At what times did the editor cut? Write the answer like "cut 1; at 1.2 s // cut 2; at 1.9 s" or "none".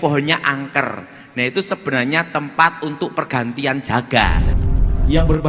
cut 1; at 4.5 s